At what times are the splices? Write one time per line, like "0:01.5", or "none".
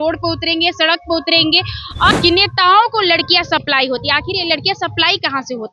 0:02.2